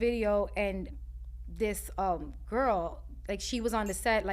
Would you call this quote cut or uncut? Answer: cut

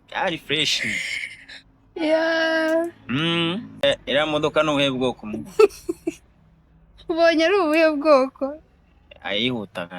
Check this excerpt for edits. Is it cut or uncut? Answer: cut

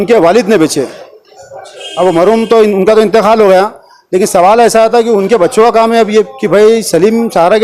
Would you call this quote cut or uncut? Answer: uncut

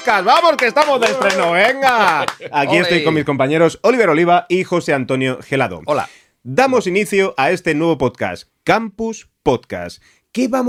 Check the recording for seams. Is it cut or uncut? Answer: uncut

